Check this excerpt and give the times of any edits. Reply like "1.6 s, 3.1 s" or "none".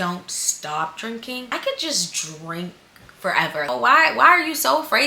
1.5 s, 3.7 s